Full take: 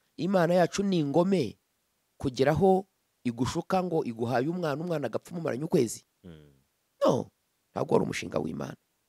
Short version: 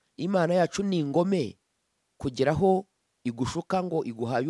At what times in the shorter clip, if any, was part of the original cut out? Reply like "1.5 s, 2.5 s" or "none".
none